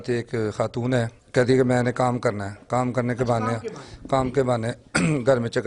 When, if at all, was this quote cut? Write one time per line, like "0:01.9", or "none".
0:01.2